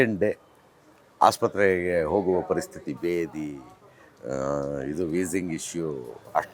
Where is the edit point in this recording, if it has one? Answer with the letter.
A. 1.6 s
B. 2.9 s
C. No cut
C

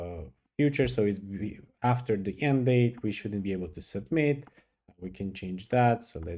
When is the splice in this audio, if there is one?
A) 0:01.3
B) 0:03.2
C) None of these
C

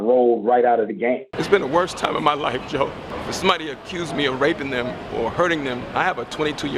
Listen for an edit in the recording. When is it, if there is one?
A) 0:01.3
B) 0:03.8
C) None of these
A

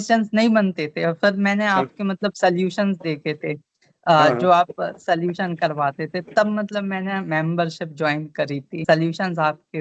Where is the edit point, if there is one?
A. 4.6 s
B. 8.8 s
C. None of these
B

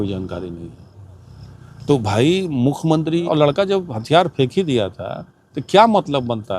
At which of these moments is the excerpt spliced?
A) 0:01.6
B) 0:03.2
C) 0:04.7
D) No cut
B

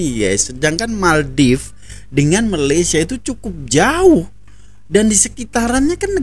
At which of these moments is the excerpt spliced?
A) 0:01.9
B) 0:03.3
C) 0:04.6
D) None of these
D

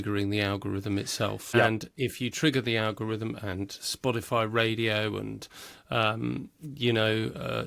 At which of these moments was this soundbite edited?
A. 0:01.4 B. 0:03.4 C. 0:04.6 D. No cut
A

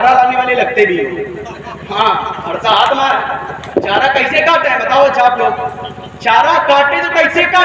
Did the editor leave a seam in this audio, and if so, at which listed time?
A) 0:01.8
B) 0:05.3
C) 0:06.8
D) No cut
D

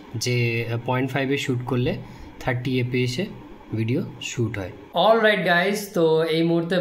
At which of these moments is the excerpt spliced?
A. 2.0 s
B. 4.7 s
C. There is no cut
C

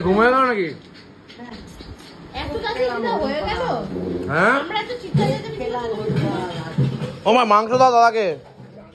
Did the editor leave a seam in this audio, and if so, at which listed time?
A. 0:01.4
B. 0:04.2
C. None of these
C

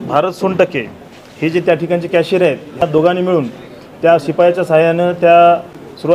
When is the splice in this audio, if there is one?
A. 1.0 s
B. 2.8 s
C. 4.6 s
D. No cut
B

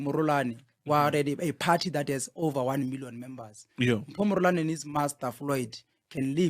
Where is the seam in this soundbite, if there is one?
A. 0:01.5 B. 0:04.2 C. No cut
C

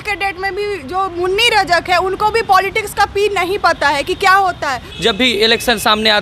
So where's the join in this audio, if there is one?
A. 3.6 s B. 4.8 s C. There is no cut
B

